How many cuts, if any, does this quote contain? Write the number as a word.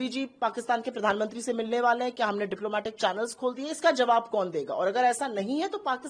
zero